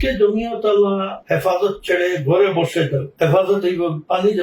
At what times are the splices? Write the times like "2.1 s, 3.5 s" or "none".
1.1 s, 3.1 s